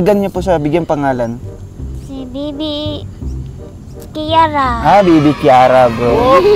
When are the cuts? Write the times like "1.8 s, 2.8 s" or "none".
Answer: none